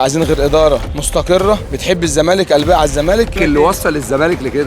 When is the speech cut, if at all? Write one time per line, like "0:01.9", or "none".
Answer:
0:01.0
0:01.7
0:03.4